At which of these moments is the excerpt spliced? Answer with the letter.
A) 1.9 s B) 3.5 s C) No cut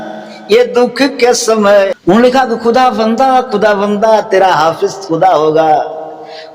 A